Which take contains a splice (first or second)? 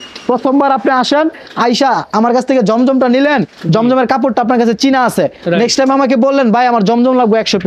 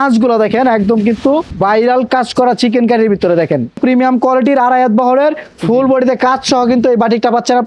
second